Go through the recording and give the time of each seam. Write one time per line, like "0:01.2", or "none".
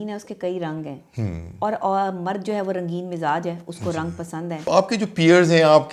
0:04.6